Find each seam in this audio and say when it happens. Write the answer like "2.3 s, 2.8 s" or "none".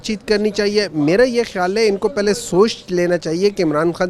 none